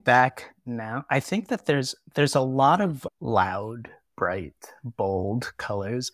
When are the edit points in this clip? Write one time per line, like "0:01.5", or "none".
0:01.0
0:03.0